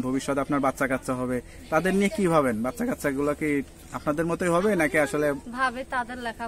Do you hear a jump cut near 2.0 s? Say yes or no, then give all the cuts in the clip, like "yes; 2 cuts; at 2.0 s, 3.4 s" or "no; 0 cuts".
no; 0 cuts